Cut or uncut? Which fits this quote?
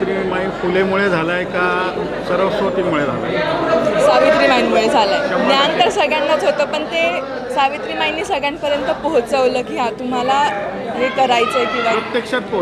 uncut